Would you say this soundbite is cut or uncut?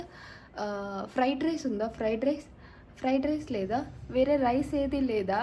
uncut